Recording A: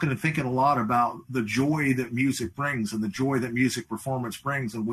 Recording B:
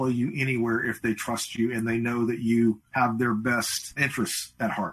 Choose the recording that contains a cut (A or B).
B